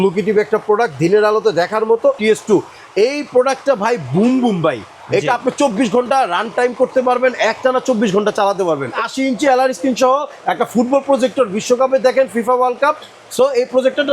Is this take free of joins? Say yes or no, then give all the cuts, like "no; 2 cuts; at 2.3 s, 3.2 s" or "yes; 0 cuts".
no; 2 cuts; at 2.2 s, 8.9 s